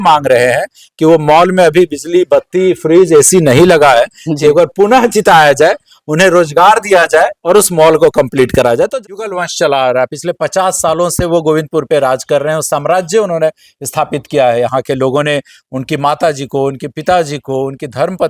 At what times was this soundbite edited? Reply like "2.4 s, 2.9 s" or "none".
9.0 s